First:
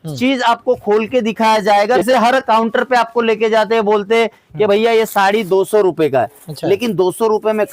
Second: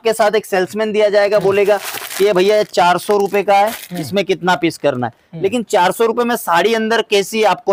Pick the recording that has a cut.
first; 1 cut; at 2.0 s

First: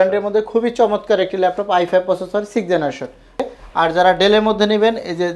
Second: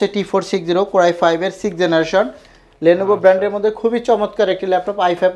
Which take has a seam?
first; 1 cut; at 3.4 s

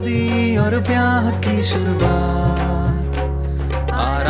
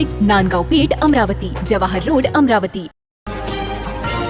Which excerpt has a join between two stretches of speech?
second; 1 cut; at 3.1 s

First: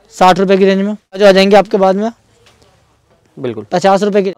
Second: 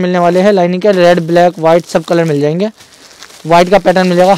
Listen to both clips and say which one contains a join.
first; 1 cut; at 1.2 s

